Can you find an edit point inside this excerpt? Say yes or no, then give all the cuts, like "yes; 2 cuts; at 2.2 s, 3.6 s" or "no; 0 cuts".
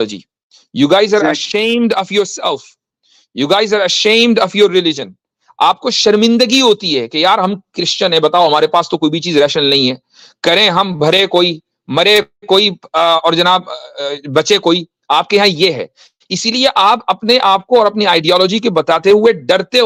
no; 0 cuts